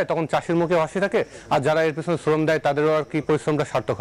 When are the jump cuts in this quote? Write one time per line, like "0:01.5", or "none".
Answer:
none